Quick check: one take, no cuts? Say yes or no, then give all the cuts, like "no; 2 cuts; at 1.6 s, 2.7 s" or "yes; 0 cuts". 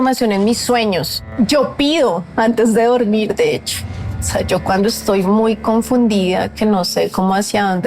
no; 1 cut; at 1.3 s